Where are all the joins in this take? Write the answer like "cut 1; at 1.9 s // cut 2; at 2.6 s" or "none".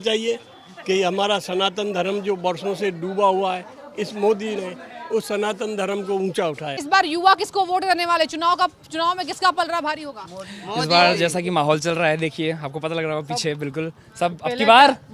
cut 1; at 6.8 s